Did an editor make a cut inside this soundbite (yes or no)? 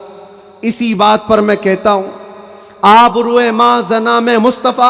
no